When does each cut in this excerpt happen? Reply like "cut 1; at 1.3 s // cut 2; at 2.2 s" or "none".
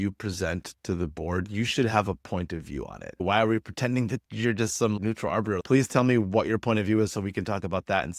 cut 1; at 3.2 s // cut 2; at 5.6 s